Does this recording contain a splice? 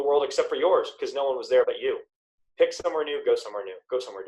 yes; 1 cut; at 1.6 s

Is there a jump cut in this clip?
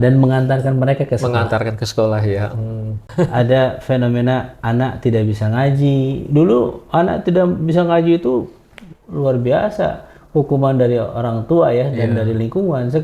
yes; 1 cut; at 3.0 s

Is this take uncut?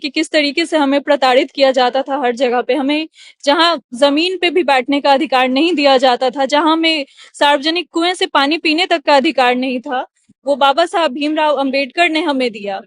yes; 0 cuts

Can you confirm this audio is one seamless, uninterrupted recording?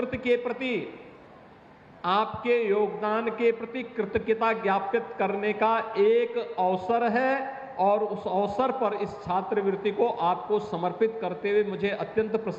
yes; 0 cuts

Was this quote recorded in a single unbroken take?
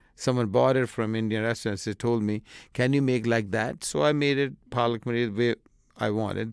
no; 1 cut; at 0.9 s

